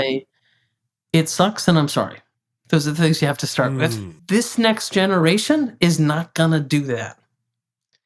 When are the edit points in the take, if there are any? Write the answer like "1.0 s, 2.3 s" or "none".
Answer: 4.1 s